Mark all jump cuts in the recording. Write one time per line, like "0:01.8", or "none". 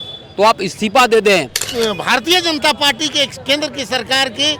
0:01.6